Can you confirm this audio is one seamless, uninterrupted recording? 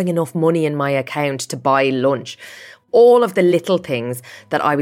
no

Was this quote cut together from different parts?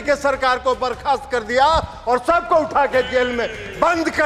no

